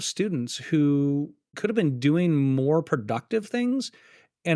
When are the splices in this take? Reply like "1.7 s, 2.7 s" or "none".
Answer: 1.4 s